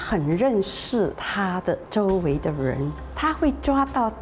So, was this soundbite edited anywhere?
yes; 2 cuts; at 1.7 s, 3.0 s

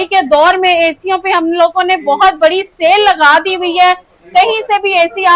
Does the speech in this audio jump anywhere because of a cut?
no; 0 cuts

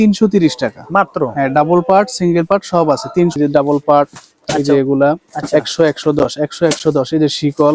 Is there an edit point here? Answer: yes; 1 cut; at 3.4 s

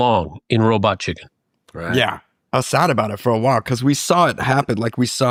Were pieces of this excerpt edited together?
no; 0 cuts

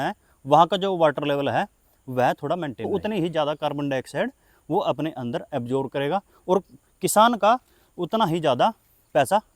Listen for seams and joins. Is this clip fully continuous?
no; 1 cut; at 2.9 s

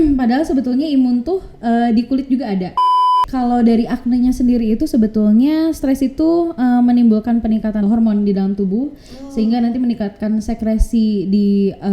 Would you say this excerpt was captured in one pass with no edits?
no; 2 cuts; at 3.1 s, 7.8 s

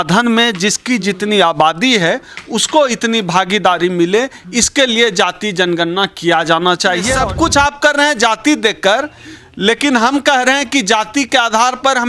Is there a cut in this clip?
yes; 1 cut; at 7.1 s

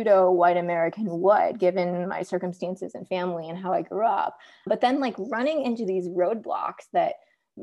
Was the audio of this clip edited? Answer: no; 0 cuts

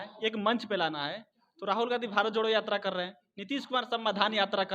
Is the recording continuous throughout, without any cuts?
yes; 0 cuts

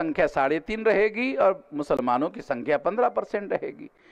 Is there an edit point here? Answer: no; 0 cuts

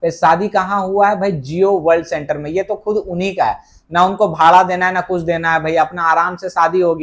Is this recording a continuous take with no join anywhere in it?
yes; 0 cuts

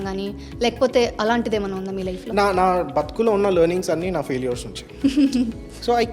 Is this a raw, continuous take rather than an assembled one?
yes; 0 cuts

